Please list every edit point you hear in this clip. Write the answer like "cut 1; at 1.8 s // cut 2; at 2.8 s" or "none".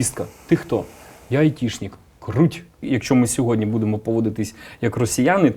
cut 1; at 2.8 s